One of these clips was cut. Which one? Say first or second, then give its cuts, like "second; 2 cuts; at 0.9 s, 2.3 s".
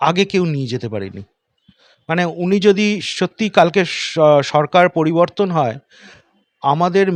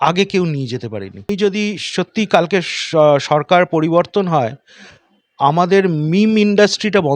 second; 1 cut; at 1.3 s